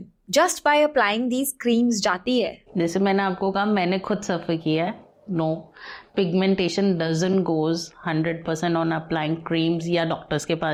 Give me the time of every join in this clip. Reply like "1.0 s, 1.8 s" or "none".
none